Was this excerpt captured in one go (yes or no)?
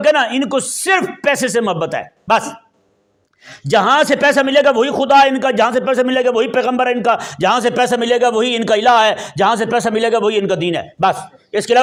yes